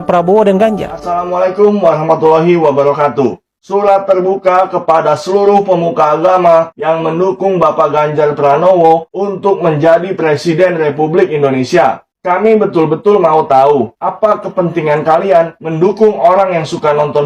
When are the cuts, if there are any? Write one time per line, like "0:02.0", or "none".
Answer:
0:01.2